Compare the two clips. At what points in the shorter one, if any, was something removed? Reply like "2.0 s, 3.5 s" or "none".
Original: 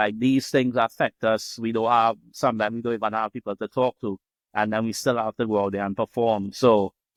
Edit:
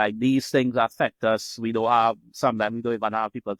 none